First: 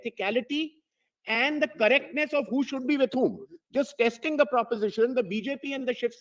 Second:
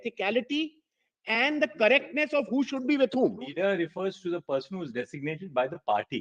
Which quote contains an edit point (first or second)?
second